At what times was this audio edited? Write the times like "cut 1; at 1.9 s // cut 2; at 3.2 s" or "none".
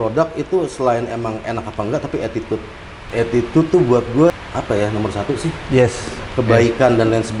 cut 1; at 2.9 s // cut 2; at 4.3 s